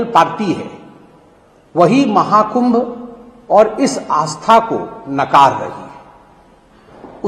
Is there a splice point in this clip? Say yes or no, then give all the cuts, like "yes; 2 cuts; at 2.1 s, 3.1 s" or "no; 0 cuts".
no; 0 cuts